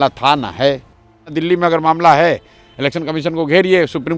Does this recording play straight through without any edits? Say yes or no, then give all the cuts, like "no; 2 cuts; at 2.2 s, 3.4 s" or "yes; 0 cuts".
no; 1 cut; at 1.3 s